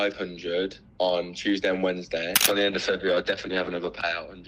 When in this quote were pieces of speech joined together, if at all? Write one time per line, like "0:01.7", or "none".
0:02.4